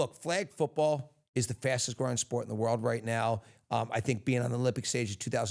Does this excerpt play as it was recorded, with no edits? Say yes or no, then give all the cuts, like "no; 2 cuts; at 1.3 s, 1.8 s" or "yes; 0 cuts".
yes; 0 cuts